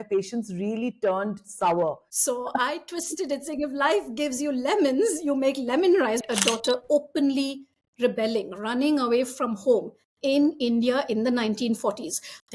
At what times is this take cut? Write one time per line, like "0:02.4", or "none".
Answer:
0:02.1
0:06.2